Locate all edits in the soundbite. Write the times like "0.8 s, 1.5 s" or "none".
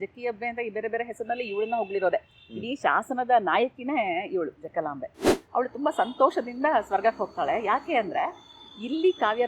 5.3 s